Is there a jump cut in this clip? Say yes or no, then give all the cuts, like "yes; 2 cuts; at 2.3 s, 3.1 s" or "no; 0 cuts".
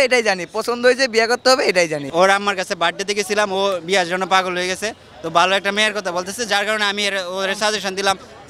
yes; 1 cut; at 2.0 s